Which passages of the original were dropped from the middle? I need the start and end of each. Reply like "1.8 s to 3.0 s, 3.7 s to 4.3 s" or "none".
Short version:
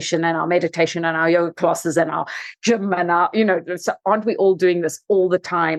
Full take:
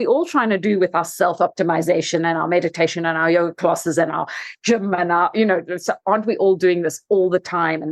none